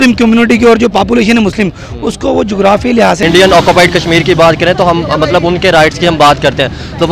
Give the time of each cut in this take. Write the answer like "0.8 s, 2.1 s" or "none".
3.2 s